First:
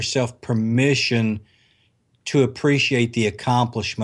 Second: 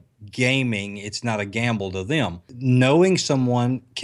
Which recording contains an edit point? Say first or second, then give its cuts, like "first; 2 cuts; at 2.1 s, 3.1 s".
second; 1 cut; at 2.5 s